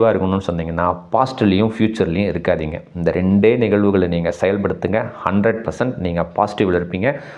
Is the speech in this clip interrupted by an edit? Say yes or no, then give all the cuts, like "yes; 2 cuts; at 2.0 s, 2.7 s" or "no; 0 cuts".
no; 0 cuts